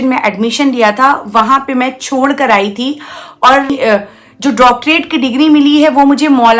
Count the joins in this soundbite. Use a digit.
1